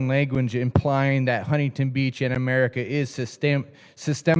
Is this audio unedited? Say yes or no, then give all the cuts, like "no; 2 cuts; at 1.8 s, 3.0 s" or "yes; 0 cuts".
yes; 0 cuts